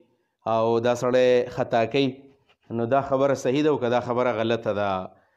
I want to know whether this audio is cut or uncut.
uncut